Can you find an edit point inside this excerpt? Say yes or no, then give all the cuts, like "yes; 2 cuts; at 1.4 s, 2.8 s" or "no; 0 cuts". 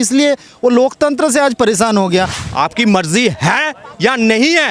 yes; 1 cut; at 2.4 s